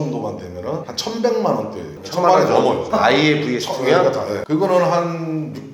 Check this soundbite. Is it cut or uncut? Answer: cut